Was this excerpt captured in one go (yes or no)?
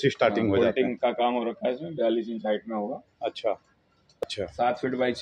no